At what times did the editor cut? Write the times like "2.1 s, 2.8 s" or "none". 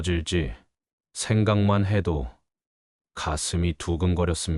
none